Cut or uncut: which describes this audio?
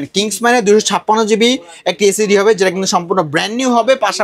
uncut